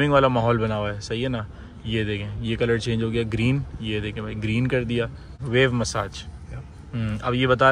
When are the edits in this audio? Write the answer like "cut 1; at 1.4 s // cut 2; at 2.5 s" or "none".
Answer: cut 1; at 5.4 s